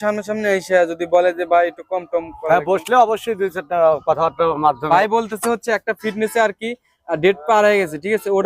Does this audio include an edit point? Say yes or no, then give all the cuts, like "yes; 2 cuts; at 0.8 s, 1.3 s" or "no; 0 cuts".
yes; 1 cut; at 4.8 s